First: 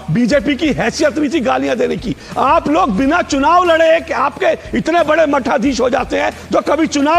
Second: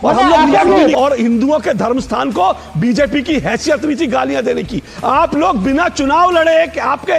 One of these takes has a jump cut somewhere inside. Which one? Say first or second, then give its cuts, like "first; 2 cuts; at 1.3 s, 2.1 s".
second; 1 cut; at 0.9 s